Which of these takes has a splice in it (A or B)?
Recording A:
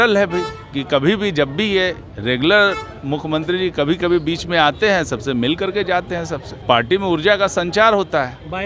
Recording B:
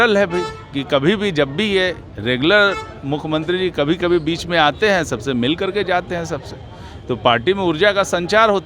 A